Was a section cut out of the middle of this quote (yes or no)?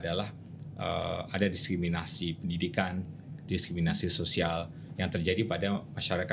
no